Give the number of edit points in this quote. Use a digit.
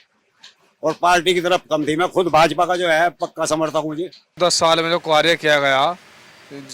1